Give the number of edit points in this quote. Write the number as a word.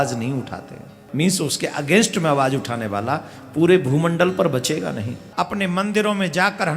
two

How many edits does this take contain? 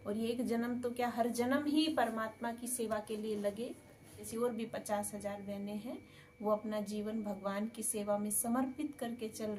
one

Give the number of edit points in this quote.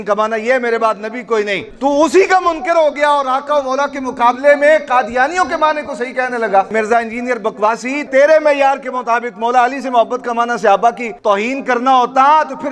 four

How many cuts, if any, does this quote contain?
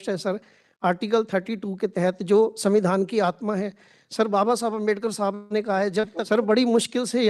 one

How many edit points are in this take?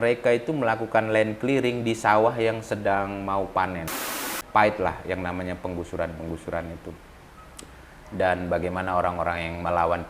one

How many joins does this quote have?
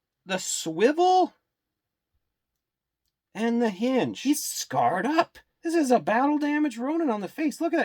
one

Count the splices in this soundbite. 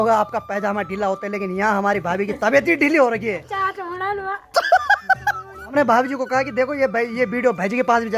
two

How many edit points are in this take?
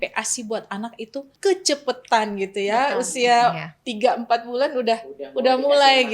one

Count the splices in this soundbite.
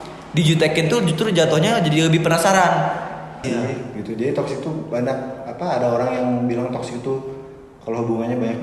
one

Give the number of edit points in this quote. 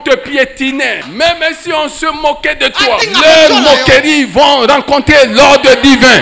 two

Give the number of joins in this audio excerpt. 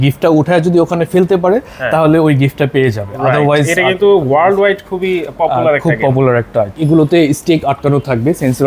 one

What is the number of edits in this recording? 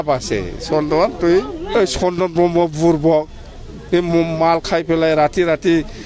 one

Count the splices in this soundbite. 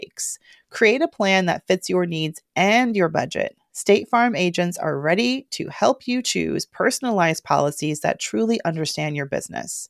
zero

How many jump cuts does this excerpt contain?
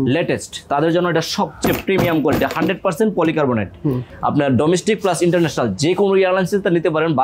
one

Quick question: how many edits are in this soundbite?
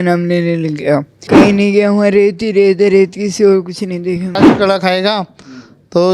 two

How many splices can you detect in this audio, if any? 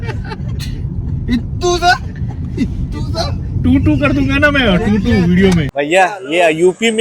one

